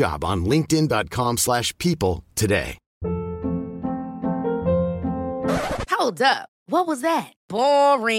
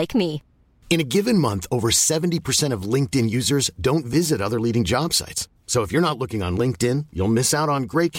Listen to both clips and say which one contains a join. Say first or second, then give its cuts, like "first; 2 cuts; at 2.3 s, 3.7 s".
first; 1 cut; at 2.8 s